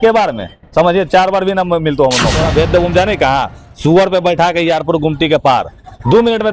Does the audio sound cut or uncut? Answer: cut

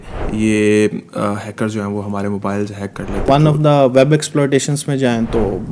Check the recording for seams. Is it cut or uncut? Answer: cut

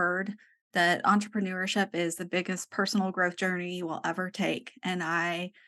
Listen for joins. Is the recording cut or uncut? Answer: uncut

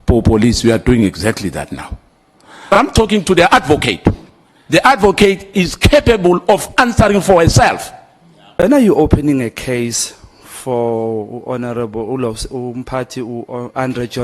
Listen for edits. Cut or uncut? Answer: cut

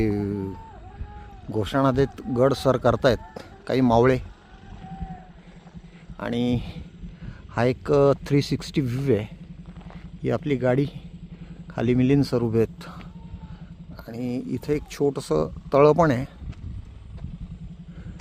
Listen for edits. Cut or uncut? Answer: uncut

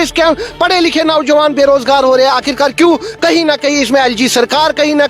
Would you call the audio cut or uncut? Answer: uncut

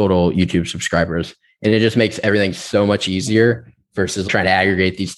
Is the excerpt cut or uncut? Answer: cut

